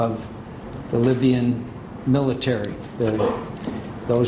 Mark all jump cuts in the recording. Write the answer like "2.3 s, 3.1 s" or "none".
none